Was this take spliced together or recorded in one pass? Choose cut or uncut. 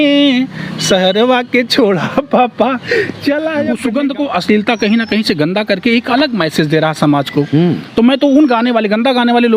cut